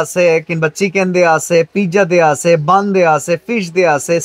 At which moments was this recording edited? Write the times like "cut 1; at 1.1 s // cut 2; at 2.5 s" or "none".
none